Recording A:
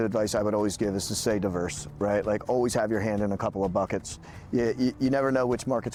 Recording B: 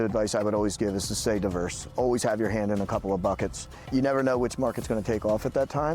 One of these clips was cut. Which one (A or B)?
B